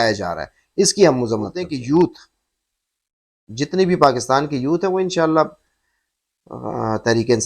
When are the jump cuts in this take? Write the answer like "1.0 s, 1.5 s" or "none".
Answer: 1.6 s